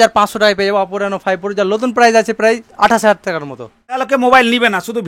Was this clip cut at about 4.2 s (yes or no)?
yes